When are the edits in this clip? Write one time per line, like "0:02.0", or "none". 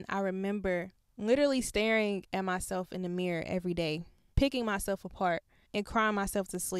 0:01.0
0:04.2
0:05.6